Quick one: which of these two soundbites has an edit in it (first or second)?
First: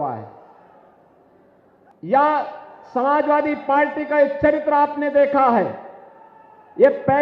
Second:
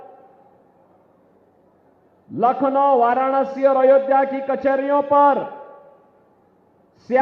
first